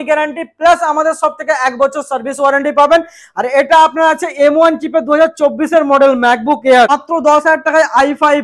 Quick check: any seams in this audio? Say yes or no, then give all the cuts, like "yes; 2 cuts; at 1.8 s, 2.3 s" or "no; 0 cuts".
yes; 1 cut; at 6.9 s